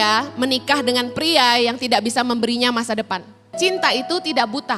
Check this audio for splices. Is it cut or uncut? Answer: cut